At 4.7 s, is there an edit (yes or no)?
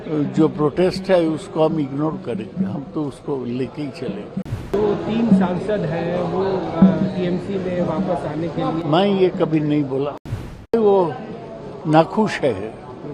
yes